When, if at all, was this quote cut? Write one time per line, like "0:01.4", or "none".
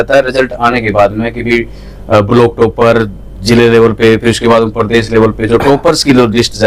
none